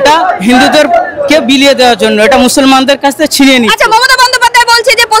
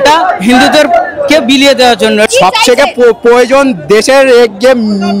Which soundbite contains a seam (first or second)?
second